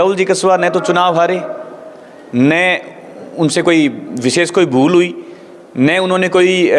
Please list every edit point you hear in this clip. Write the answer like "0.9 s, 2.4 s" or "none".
none